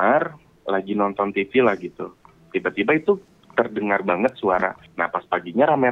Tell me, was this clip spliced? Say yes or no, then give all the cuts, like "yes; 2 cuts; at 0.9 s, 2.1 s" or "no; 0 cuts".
yes; 1 cut; at 4.9 s